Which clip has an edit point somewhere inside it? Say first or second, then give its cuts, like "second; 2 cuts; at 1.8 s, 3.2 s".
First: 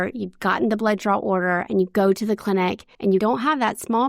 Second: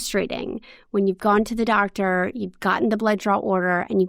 first; 1 cut; at 3.2 s